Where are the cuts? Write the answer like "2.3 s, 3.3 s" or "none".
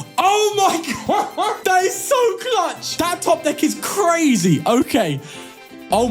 1.6 s, 2.8 s